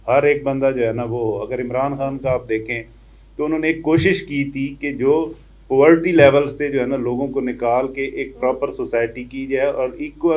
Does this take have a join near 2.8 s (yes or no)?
no